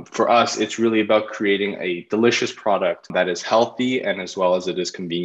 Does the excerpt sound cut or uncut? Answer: cut